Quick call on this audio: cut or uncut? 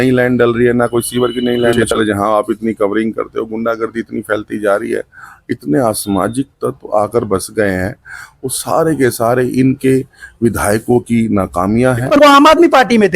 cut